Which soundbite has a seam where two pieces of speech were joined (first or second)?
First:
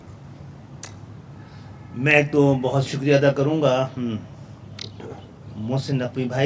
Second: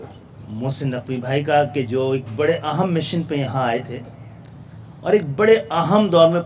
first